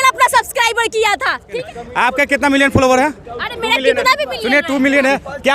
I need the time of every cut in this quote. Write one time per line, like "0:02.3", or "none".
0:01.5